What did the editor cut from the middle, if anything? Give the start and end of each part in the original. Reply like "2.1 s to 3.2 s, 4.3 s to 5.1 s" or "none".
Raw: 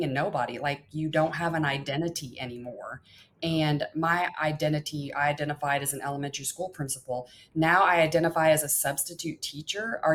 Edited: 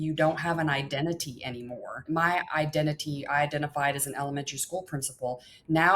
3.0 s to 3.9 s